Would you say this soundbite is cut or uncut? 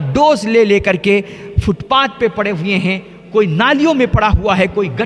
uncut